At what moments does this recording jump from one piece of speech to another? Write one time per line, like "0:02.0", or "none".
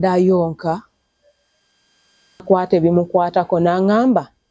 0:02.4